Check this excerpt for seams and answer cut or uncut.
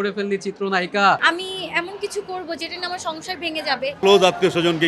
cut